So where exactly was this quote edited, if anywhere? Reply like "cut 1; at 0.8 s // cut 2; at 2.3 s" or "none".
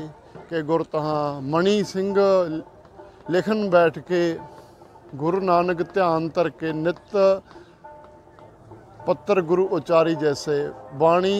none